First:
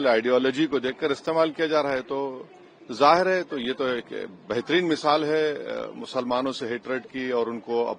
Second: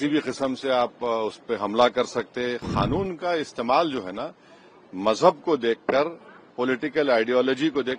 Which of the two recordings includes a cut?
second; 1 cut; at 2.7 s

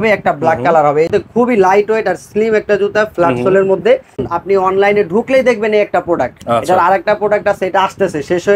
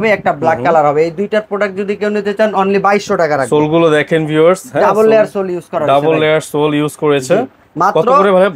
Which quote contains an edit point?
first; 2 cuts; at 1.1 s, 4.2 s

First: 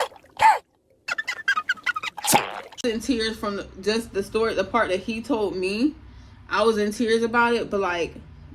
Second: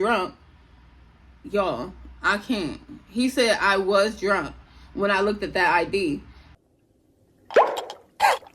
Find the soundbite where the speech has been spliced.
first; 1 cut; at 2.8 s

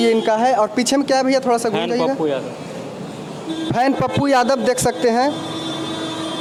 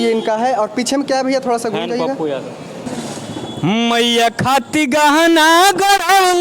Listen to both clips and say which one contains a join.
second; 1 cut; at 2.9 s

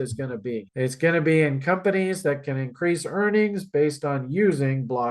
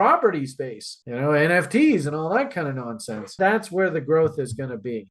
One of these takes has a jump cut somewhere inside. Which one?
second; 1 cut; at 3.3 s

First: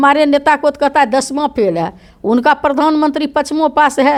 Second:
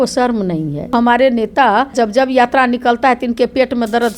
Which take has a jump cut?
second; 2 cuts; at 0.9 s, 1.9 s

